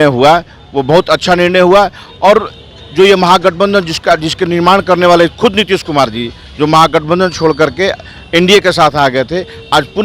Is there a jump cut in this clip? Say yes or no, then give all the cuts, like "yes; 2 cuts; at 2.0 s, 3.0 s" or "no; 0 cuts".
no; 0 cuts